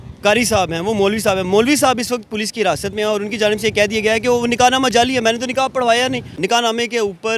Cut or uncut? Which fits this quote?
cut